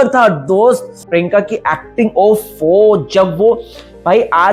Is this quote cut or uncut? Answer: cut